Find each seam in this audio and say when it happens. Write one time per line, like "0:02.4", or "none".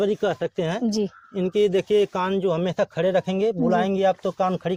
none